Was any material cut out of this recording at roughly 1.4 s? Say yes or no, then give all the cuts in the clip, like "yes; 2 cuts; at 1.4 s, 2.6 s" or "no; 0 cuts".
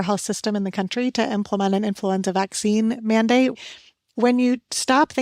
no; 1 cut; at 3.6 s